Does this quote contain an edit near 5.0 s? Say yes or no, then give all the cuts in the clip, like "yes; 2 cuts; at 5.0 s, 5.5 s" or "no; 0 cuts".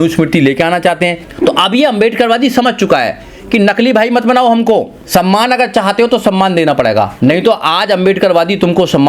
yes; 3 cuts; at 1.2 s, 5.0 s, 7.1 s